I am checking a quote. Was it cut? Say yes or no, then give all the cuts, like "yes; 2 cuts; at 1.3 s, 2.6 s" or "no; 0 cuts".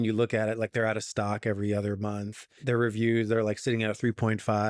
yes; 1 cut; at 2.5 s